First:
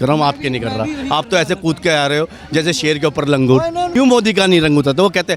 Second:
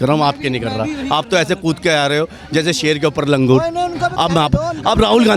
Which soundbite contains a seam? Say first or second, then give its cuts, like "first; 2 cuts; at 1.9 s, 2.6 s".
first; 1 cut; at 3.9 s